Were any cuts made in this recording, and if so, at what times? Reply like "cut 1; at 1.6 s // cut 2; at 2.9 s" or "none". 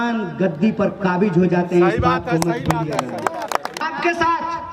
cut 1; at 3.8 s

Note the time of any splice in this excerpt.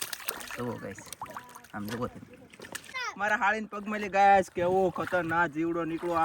cut 1; at 3.0 s

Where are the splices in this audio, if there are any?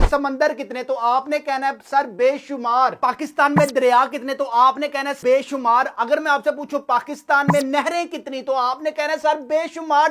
none

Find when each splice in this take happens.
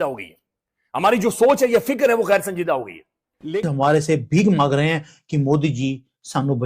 cut 1; at 3.7 s

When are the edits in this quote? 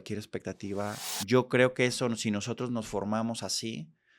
cut 1; at 1.1 s

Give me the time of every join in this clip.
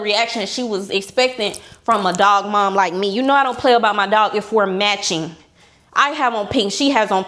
none

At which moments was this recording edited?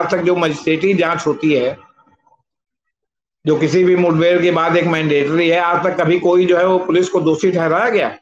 none

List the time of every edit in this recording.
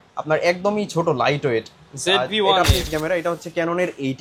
cut 1; at 2.9 s

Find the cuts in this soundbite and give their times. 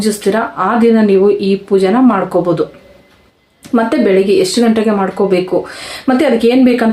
none

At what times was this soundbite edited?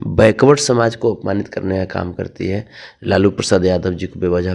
none

